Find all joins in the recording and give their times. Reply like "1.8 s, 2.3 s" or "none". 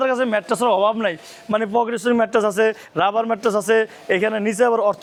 none